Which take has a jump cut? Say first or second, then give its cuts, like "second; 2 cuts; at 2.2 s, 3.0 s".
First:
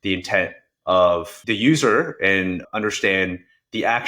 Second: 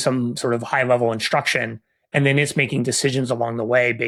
first; 2 cuts; at 1.4 s, 2.6 s